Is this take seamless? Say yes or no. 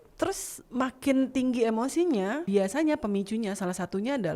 no